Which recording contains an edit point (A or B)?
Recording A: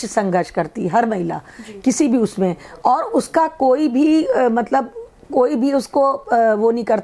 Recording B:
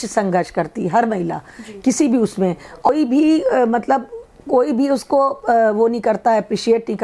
B